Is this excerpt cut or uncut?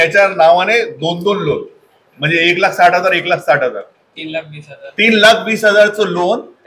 uncut